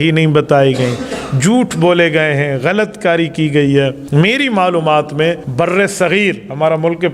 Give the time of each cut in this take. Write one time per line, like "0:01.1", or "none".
0:04.0
0:05.4